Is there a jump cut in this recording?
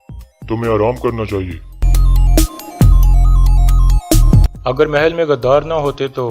yes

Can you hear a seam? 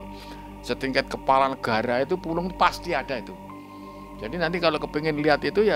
no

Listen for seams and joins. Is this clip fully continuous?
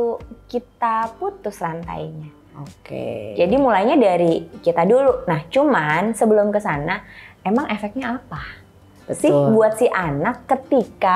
yes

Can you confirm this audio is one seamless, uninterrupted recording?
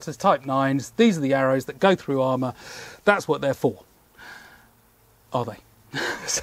yes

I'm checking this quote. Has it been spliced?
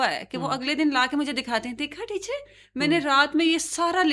no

